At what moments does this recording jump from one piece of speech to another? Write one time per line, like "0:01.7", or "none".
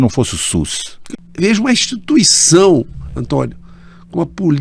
0:01.0